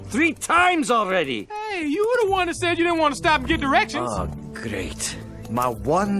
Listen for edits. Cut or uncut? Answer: cut